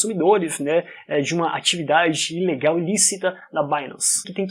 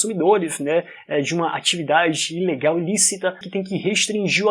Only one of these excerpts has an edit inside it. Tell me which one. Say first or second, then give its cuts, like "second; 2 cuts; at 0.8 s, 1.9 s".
second; 1 cut; at 3.4 s